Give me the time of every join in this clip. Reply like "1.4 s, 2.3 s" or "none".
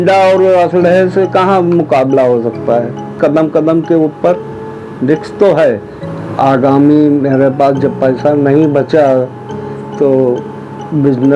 3.1 s, 5.9 s